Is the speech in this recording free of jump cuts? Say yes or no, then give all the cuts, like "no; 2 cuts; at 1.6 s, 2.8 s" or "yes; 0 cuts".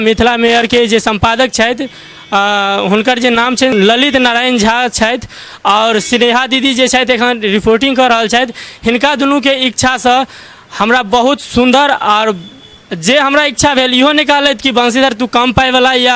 no; 1 cut; at 3.7 s